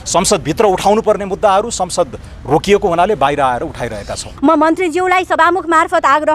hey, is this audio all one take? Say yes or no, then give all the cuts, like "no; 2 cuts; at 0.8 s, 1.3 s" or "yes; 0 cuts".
no; 1 cut; at 4.3 s